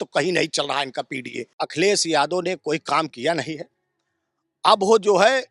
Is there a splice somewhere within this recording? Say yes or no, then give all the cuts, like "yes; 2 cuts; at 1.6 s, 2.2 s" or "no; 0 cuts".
yes; 1 cut; at 1.5 s